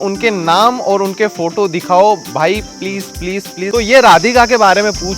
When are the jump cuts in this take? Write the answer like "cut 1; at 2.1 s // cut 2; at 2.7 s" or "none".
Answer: cut 1; at 3.7 s